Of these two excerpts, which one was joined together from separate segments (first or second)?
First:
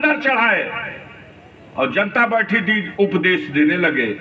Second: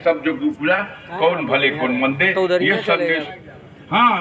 second